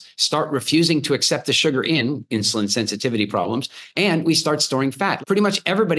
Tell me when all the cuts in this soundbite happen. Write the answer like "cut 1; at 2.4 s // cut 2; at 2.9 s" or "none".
cut 1; at 5.1 s